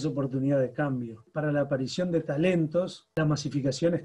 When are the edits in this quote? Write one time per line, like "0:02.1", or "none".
0:01.3
0:03.0